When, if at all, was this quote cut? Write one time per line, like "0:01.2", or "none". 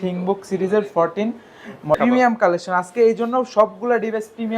0:02.0

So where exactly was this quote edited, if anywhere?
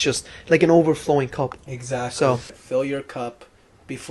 0:02.5

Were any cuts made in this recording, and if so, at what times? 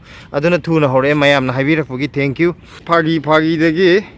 0:02.9

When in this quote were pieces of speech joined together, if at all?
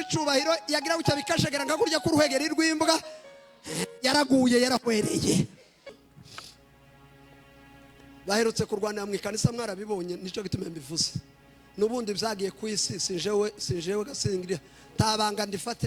0:05.9

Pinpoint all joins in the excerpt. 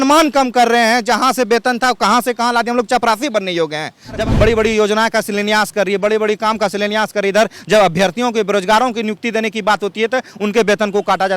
0:04.2

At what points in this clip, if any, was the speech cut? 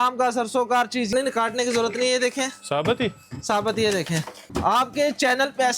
0:01.1
0:04.4

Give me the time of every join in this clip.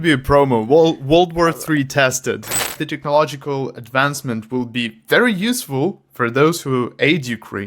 0:02.8

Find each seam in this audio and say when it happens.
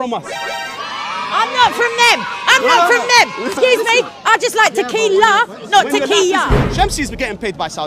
0:06.6

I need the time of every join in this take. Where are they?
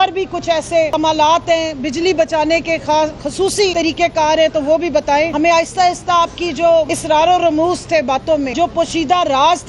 0:00.9
0:03.7
0:05.3
0:07.0
0:08.5

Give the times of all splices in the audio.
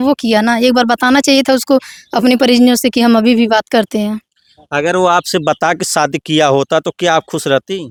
none

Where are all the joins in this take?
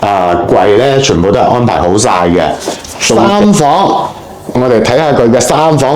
0:03.2

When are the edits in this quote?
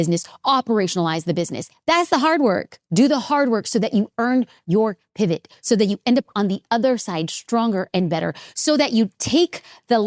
0:02.8

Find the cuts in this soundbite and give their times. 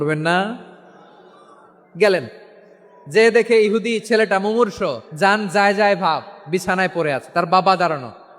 0:05.1

